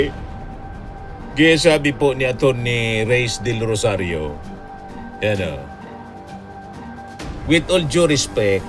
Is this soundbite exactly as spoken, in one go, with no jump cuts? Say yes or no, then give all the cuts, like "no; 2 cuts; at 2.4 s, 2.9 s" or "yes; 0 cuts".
yes; 0 cuts